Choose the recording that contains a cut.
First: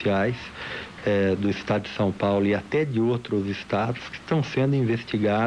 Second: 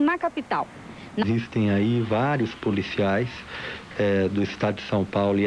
second; 1 cut; at 1.3 s

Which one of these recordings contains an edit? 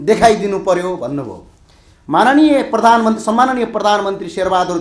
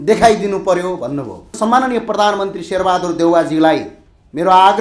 second; 1 cut; at 1.6 s

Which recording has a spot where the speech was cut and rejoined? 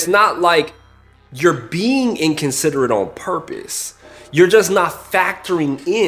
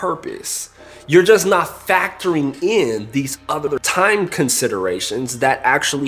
second; 1 cut; at 3.8 s

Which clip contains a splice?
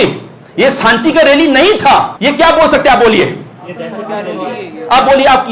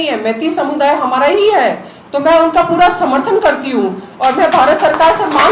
first; 1 cut; at 2.1 s

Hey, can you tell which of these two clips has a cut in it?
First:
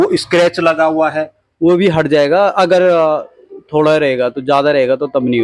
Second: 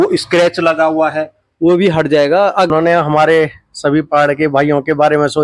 second; 1 cut; at 2.7 s

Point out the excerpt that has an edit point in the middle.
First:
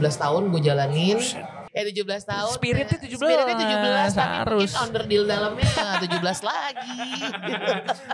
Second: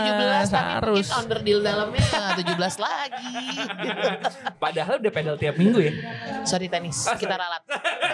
first; 1 cut; at 1.5 s

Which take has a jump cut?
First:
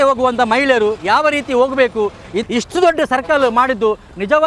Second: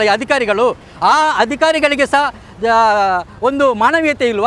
first; 1 cut; at 2.3 s

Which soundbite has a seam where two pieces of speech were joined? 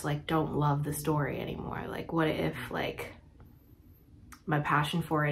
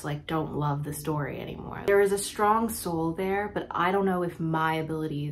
second; 1 cut; at 1.7 s

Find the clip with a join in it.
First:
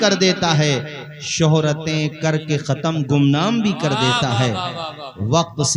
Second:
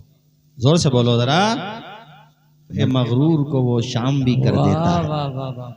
second; 1 cut; at 2.8 s

